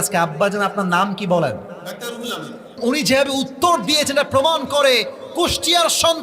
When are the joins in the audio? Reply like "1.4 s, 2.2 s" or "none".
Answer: 2.8 s